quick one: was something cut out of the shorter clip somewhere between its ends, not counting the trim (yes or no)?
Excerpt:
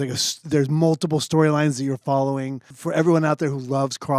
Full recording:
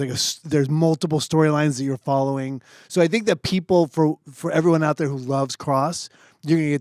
yes